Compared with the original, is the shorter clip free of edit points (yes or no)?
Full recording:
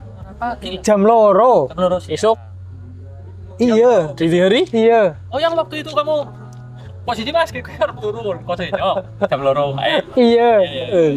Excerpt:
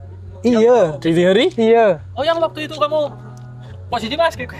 yes